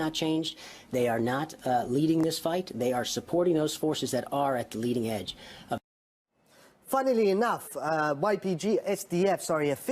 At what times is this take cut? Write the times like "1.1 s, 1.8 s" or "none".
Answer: 4.1 s